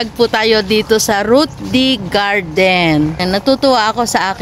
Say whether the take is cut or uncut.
cut